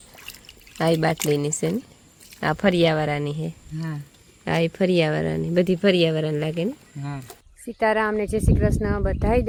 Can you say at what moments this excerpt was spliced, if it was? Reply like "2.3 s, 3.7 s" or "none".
none